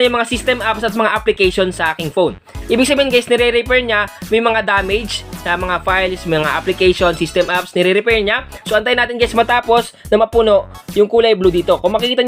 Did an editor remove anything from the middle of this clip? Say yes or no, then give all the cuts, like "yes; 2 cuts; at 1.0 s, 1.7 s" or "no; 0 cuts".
no; 0 cuts